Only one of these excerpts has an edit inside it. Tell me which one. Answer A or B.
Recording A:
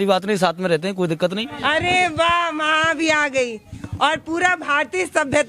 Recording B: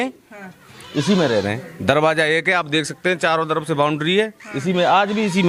A